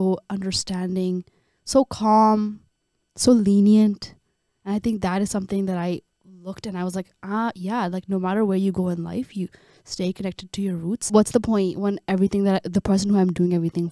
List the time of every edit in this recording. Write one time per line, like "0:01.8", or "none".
0:11.1